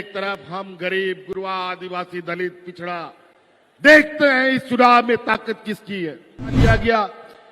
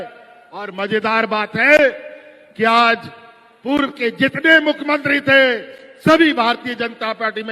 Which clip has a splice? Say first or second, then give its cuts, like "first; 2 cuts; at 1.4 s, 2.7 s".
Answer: first; 1 cut; at 6.6 s